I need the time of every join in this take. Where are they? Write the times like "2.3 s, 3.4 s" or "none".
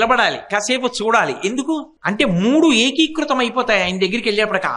1.9 s

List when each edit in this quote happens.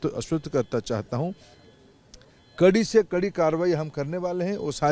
none

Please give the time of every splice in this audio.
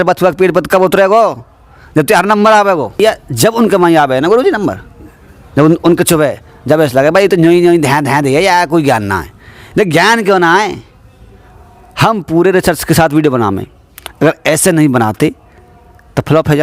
3.0 s

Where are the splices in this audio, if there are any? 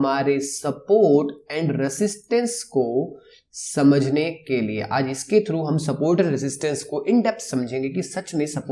none

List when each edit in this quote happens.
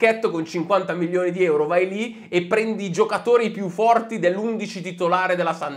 none

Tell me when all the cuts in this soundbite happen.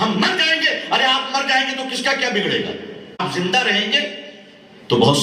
3.2 s

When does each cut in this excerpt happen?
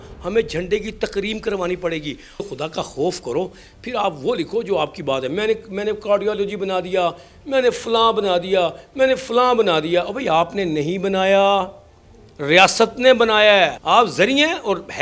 2.4 s, 13.8 s

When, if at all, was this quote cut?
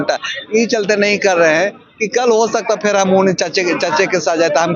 none

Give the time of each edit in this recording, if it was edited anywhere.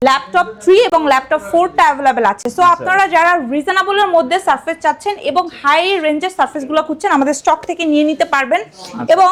none

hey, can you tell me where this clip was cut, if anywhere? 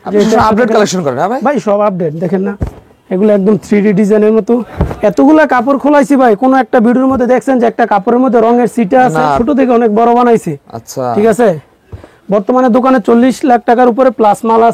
4.7 s, 9.4 s

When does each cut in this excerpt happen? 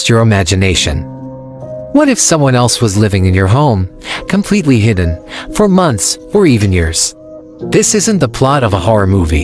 7.9 s

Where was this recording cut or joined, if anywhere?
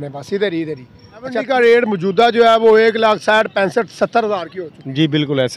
1.4 s

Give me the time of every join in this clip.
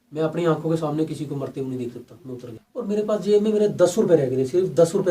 2.6 s

